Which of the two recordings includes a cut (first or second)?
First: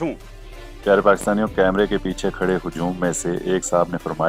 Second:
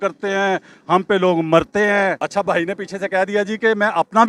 second